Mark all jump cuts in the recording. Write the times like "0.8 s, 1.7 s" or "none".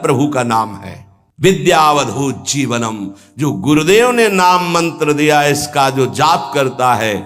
1.2 s